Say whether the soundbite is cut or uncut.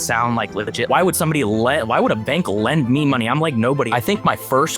cut